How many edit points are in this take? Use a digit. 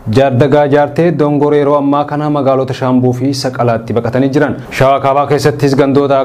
0